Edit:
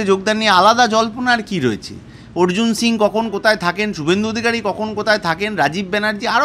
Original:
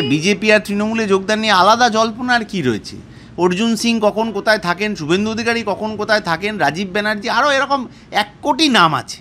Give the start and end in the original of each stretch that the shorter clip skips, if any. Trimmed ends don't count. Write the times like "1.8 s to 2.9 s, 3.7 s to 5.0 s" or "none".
none